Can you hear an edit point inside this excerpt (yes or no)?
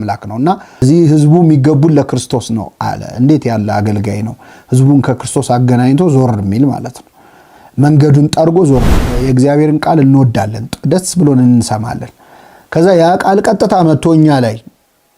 yes